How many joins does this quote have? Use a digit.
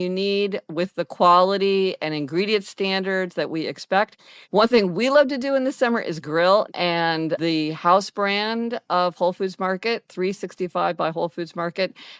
2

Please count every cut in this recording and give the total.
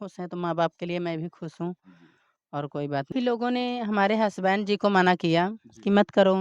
1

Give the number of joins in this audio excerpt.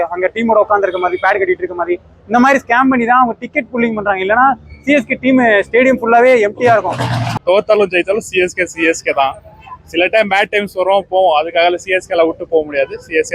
1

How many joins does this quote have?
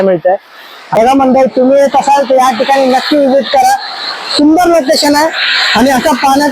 1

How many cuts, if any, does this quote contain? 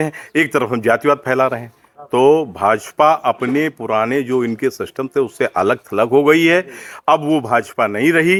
0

